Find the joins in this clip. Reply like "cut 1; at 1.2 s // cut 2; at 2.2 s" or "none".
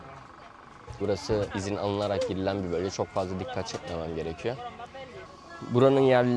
cut 1; at 1.0 s // cut 2; at 5.3 s

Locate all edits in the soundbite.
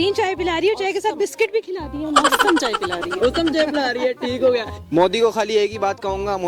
cut 1; at 4.8 s

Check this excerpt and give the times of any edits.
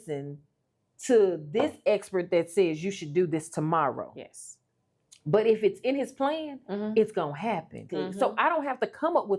cut 1; at 7.9 s

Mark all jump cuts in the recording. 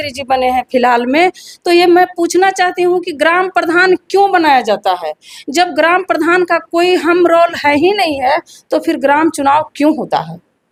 none

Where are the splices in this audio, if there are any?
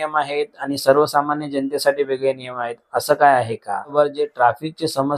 cut 1; at 3.9 s

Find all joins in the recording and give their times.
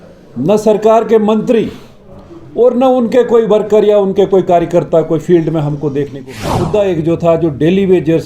cut 1; at 6.6 s

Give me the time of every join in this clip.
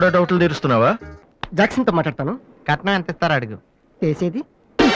cut 1; at 1.2 s

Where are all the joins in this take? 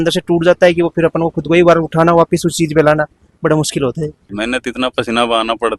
cut 1; at 4.2 s

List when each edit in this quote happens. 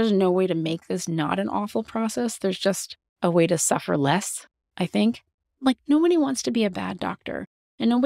cut 1; at 5.5 s

